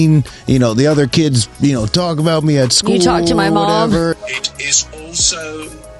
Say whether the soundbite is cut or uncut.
cut